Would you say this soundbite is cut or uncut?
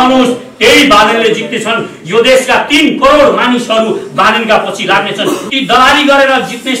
cut